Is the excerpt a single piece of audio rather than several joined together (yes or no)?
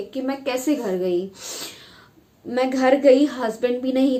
yes